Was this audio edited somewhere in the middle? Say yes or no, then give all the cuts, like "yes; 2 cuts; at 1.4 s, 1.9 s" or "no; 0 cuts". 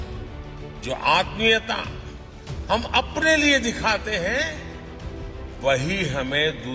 no; 0 cuts